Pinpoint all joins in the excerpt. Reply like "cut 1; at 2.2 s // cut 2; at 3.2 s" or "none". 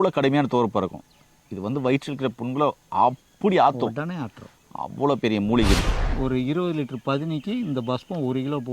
cut 1; at 5.8 s